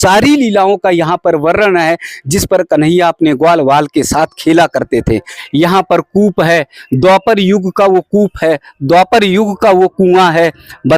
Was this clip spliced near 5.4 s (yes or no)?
yes